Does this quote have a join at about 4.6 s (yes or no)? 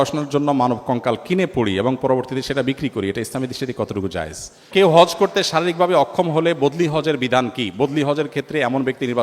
yes